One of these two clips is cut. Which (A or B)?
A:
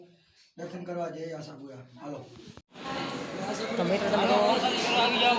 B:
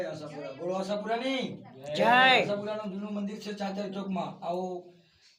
A